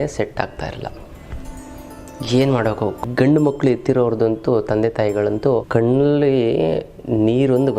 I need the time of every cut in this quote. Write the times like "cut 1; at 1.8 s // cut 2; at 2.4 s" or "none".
cut 1; at 3.0 s // cut 2; at 5.7 s